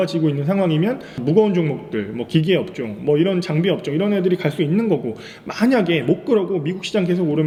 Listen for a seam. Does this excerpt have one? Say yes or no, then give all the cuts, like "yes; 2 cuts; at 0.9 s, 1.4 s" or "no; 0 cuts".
no; 0 cuts